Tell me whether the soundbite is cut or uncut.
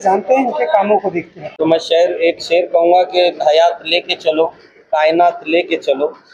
cut